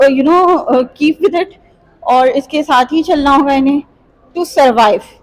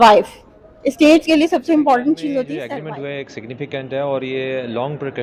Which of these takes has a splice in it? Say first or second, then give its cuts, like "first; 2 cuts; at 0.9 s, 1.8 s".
second; 1 cut; at 2.5 s